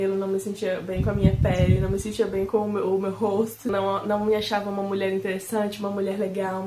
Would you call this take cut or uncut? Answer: cut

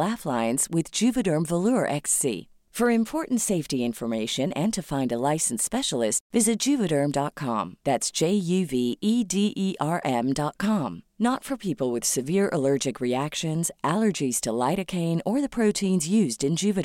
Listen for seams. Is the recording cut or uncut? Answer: uncut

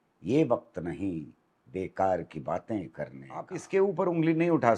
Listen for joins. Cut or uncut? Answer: cut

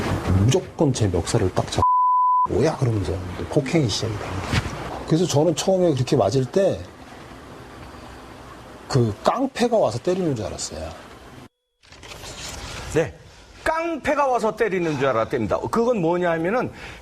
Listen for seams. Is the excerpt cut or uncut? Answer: uncut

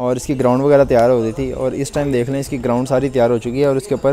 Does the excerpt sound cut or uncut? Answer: uncut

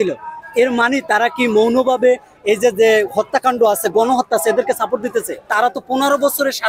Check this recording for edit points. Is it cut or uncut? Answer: cut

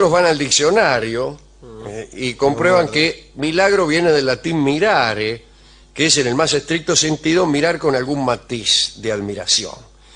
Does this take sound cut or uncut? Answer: cut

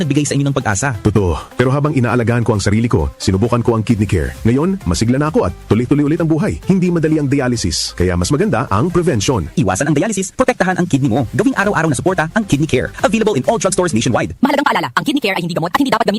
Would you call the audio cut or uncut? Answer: uncut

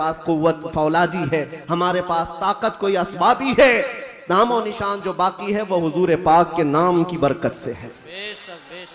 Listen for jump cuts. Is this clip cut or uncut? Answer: uncut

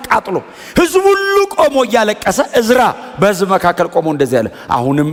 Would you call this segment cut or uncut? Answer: uncut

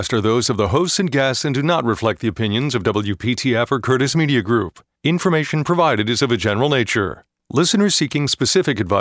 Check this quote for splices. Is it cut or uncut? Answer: uncut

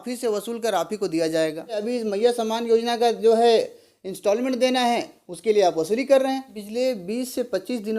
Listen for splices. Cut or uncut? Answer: cut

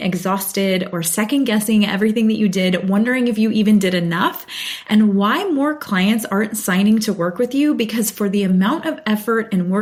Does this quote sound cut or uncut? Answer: uncut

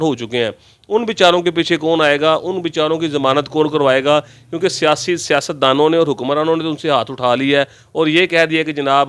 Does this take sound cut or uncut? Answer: uncut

